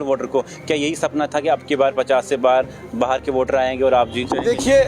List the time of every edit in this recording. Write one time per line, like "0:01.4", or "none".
none